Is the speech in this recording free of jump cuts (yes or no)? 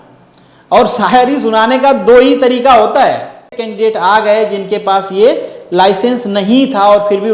no